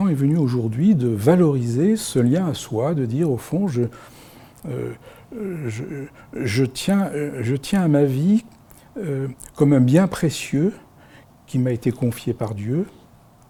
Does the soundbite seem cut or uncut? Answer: uncut